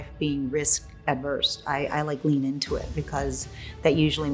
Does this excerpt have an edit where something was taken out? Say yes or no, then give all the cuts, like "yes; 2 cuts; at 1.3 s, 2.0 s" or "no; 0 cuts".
no; 0 cuts